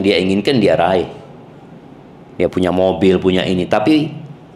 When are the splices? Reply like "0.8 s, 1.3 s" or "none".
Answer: none